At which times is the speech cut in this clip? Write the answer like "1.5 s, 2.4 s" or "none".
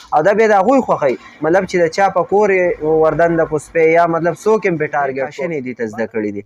5.4 s